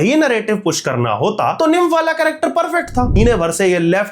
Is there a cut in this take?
yes; 2 cuts; at 1.5 s, 3.2 s

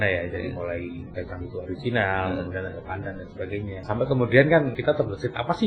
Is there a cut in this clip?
yes; 2 cuts; at 3.8 s, 4.7 s

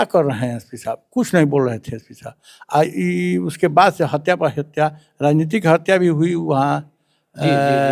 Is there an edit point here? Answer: no; 0 cuts

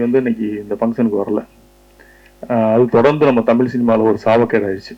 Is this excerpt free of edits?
yes; 0 cuts

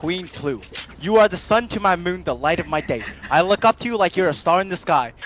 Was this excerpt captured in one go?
yes; 0 cuts

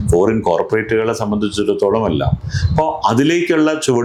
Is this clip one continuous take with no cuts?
yes; 0 cuts

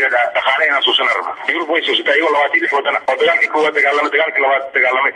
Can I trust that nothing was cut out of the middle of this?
no; 2 cuts; at 1.4 s, 3.0 s

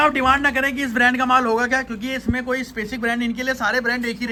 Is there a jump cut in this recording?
no; 0 cuts

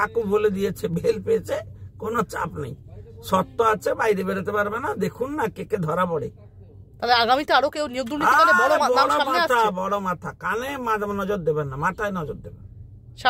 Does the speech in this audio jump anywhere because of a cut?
no; 0 cuts

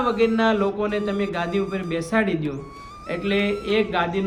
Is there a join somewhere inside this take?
no; 0 cuts

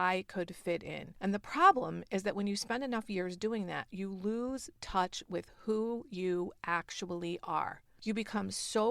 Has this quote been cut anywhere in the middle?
yes; 2 cuts; at 1.0 s, 7.9 s

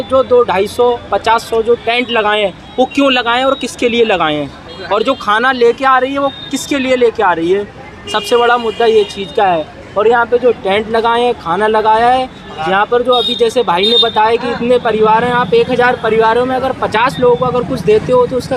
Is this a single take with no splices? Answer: yes; 0 cuts

